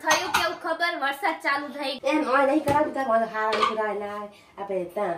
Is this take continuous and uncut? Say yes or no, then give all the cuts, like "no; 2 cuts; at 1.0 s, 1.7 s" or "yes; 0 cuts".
no; 1 cut; at 1.9 s